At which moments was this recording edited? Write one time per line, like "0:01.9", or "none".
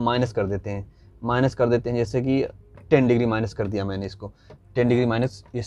none